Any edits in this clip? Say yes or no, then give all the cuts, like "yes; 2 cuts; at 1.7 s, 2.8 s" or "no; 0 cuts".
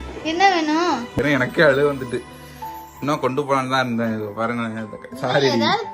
yes; 1 cut; at 1.2 s